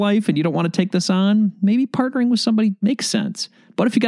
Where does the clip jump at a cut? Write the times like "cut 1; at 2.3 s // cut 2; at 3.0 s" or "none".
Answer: none